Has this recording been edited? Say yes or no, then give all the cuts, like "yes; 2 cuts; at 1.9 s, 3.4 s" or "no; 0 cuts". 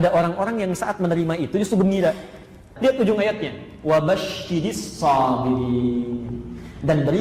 yes; 1 cut; at 2.7 s